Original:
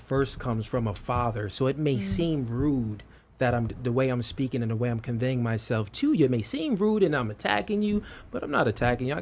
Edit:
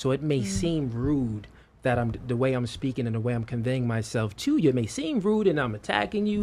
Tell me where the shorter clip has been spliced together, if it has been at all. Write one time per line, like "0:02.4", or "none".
none

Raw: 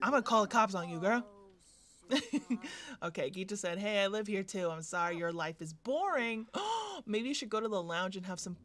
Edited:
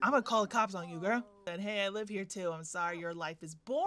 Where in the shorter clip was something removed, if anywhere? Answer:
0:01.4

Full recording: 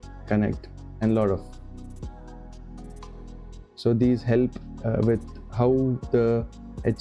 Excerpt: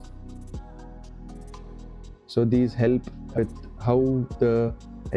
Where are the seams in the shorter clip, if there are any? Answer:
0:03.4

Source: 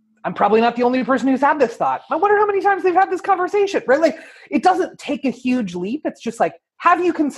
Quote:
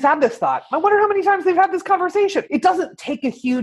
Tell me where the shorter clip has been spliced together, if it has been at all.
0:02.4

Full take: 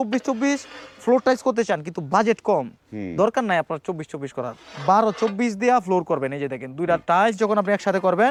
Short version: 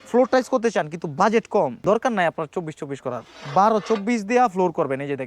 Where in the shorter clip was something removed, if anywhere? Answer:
0:01.8

